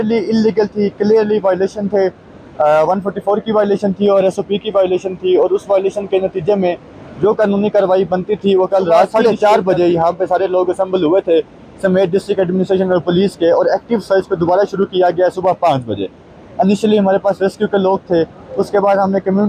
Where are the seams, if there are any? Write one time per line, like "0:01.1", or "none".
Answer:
0:09.1